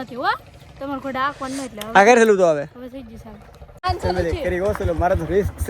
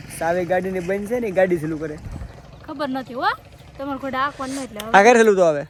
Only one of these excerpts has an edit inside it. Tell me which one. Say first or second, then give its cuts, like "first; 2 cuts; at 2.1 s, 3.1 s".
first; 1 cut; at 3.8 s